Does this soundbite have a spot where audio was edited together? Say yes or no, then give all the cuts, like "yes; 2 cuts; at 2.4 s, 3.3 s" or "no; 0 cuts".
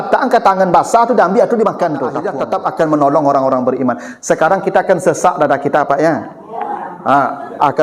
yes; 1 cut; at 2.2 s